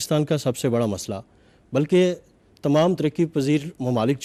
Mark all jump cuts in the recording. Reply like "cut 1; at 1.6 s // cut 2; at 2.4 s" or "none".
none